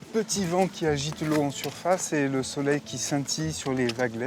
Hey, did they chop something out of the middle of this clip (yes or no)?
no